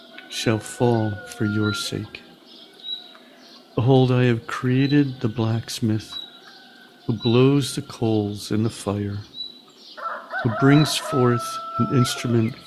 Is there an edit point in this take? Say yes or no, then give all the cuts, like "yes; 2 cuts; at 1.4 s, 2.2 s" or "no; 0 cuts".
yes; 2 cuts; at 2.1 s, 3.7 s